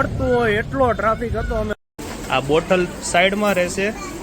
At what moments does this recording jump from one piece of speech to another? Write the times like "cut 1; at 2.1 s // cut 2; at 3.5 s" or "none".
cut 1; at 1.8 s